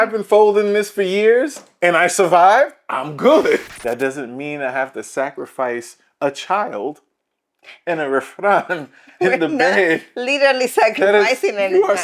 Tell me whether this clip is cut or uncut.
cut